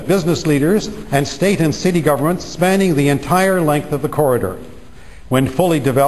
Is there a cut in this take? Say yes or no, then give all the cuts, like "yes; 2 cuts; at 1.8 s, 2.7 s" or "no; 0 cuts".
yes; 1 cut; at 5.0 s